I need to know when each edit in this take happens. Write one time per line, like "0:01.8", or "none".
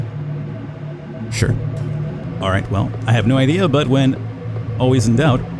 0:02.2